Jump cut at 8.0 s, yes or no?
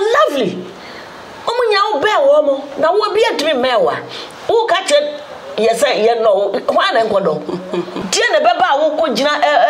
yes